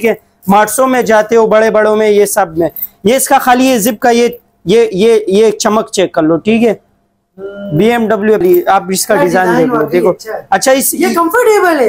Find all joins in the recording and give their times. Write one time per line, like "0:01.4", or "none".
0:08.4